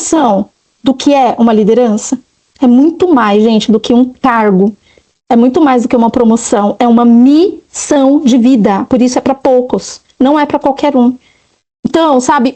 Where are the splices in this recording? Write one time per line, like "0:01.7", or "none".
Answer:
none